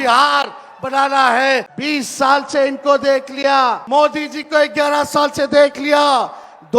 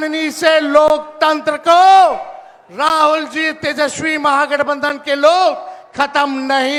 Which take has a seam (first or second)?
first